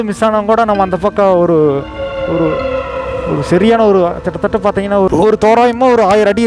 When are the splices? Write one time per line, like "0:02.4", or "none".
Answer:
none